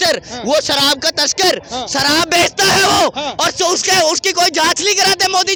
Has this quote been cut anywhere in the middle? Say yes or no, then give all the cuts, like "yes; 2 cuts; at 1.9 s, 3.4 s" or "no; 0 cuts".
no; 0 cuts